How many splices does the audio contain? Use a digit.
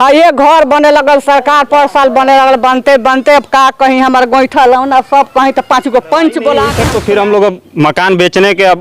1